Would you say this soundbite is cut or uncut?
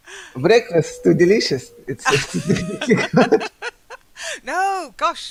uncut